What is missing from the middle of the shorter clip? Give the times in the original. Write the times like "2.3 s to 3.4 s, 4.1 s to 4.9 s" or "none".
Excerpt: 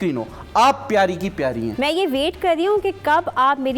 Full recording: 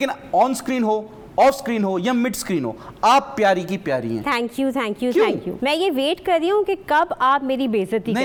4.2 s to 5.5 s

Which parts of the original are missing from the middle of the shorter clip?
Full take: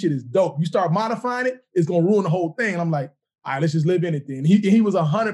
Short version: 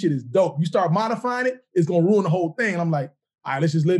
none

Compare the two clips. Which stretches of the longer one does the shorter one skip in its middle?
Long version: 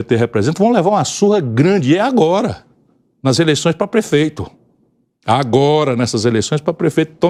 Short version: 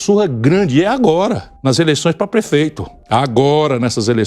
2.6 s to 3.1 s, 4.5 s to 5.1 s

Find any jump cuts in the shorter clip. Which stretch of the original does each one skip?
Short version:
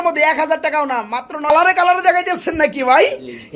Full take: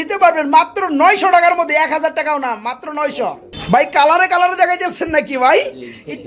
3.0 s to 4.0 s

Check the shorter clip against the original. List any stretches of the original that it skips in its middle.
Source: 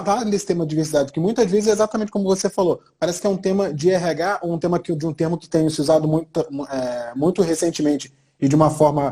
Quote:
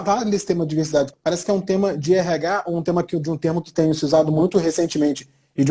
1.1 s to 2.9 s, 6.2 s to 7.2 s

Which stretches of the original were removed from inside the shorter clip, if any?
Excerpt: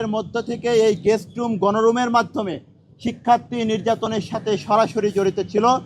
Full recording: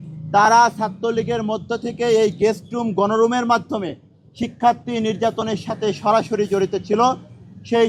none

